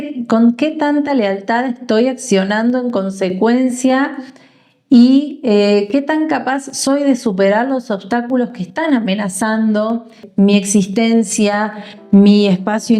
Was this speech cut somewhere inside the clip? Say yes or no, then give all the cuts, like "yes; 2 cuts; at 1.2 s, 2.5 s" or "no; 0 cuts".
yes; 1 cut; at 10.2 s